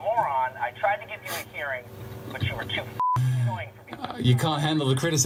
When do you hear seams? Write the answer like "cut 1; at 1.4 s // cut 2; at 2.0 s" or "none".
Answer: none